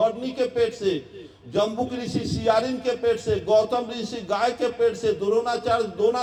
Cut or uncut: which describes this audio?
uncut